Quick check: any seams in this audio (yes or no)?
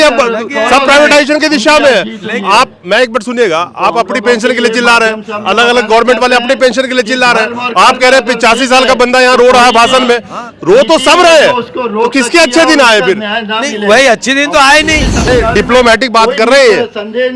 yes